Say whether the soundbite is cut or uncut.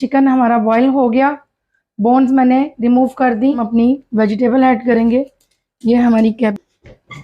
cut